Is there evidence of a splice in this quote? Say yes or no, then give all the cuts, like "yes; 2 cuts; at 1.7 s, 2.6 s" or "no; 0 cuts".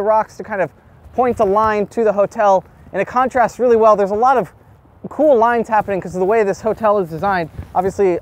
no; 0 cuts